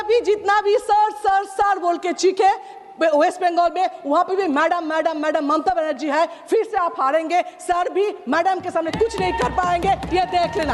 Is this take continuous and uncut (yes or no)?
yes